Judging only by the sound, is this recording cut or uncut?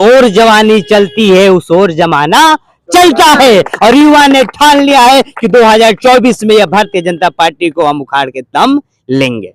uncut